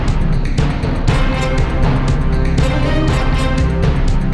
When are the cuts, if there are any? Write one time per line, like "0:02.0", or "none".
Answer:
none